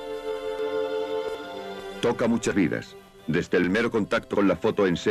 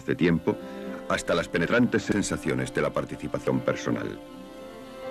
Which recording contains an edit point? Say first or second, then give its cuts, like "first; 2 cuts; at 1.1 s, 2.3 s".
second; 1 cut; at 1.9 s